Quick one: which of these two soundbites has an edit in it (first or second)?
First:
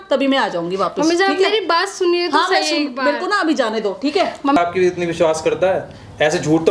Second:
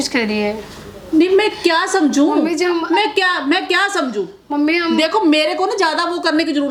first